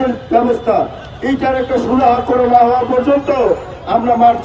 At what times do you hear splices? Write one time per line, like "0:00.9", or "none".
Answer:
none